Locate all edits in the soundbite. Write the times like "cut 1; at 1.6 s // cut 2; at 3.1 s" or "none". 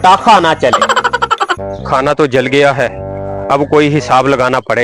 cut 1; at 1.6 s